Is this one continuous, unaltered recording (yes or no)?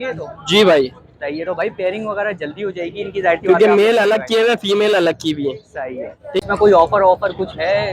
no